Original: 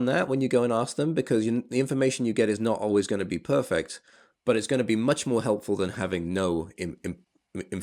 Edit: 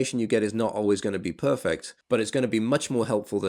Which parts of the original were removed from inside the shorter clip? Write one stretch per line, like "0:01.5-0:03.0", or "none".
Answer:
0:04.0-0:04.3